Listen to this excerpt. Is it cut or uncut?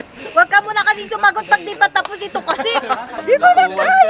cut